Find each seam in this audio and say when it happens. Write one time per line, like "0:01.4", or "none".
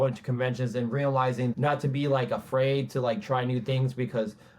0:01.5